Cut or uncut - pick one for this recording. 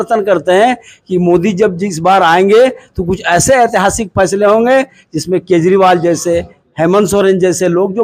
uncut